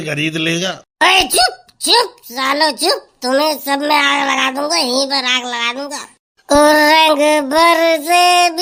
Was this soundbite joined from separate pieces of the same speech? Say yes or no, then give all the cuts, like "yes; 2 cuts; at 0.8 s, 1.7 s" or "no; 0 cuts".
no; 0 cuts